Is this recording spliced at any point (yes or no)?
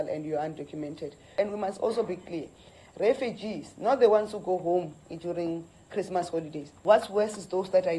yes